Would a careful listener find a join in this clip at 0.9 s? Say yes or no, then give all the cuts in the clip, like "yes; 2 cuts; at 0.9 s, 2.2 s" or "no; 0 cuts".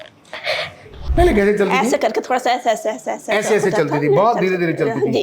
yes; 1 cut; at 0.9 s